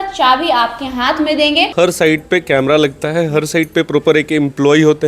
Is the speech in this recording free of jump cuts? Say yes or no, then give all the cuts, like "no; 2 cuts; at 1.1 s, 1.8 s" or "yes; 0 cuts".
no; 1 cut; at 1.7 s